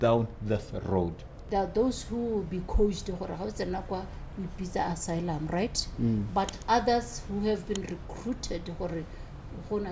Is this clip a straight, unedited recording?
no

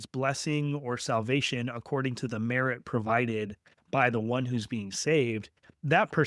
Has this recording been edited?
no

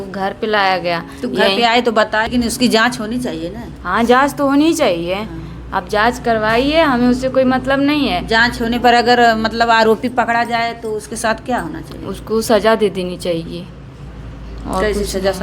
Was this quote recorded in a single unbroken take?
no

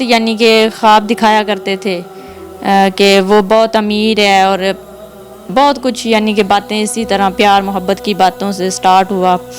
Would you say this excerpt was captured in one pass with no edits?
yes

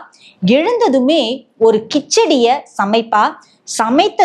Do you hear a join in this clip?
no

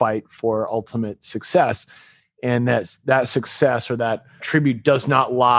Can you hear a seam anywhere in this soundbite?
yes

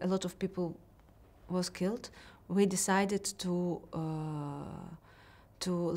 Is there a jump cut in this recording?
no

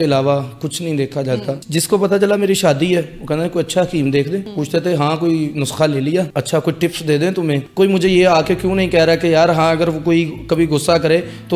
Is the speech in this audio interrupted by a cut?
yes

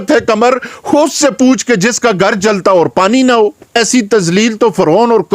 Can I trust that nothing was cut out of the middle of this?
no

